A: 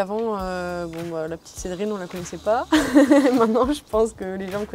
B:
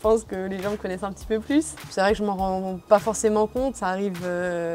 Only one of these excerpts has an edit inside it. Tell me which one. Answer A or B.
B